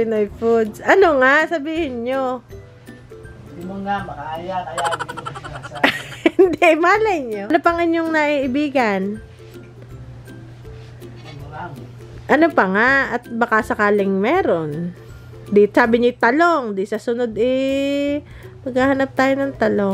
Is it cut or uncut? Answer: cut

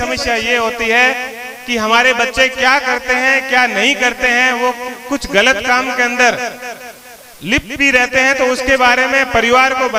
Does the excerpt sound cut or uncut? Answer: uncut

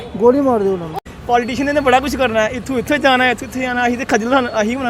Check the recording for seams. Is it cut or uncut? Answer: cut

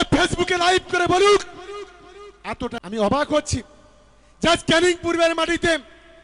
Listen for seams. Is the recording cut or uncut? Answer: cut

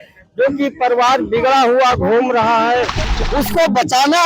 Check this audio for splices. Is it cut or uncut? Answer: cut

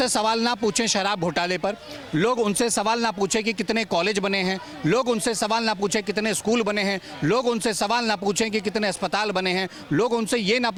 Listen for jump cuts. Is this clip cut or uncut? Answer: uncut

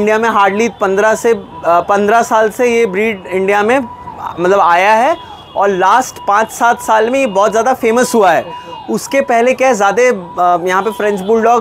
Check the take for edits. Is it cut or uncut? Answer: uncut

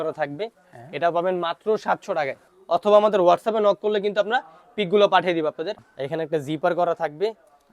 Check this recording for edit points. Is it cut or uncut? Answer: cut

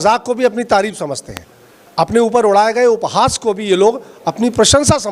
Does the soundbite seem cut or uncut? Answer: uncut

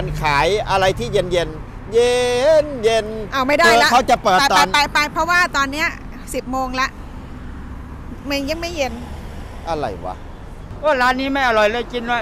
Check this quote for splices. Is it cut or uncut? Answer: cut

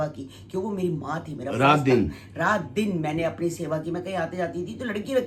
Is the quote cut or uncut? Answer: uncut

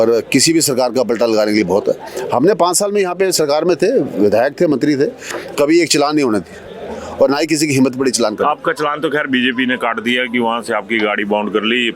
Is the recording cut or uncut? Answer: uncut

